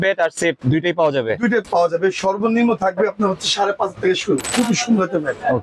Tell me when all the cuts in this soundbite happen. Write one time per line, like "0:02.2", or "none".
0:01.6
0:04.5